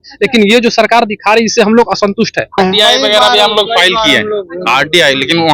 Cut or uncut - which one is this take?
cut